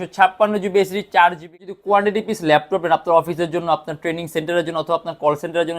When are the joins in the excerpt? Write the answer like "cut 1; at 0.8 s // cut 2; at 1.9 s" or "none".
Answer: cut 1; at 1.5 s